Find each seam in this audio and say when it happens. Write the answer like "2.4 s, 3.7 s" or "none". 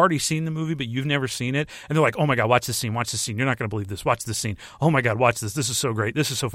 none